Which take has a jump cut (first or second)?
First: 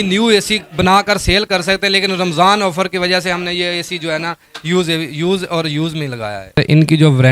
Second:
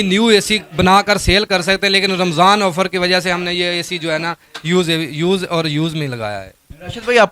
first